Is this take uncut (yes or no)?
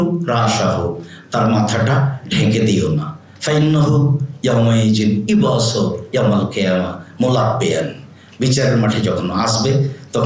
yes